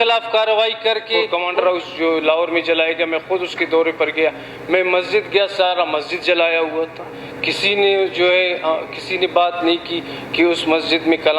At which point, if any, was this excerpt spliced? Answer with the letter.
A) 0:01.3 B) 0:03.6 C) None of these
A